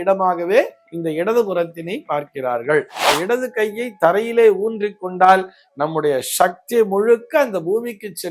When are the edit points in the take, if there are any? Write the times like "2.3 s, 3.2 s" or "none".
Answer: 3.0 s